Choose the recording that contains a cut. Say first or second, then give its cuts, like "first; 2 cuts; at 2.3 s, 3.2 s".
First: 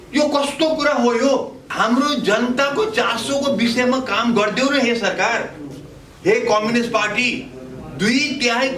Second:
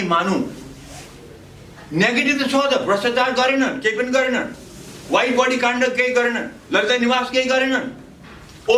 first; 1 cut; at 1.6 s